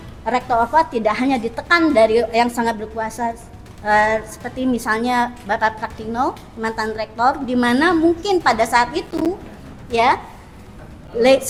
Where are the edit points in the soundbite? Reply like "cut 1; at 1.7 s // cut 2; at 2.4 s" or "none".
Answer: none